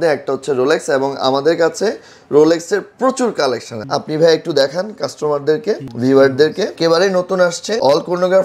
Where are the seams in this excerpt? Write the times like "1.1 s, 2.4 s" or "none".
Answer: 6.7 s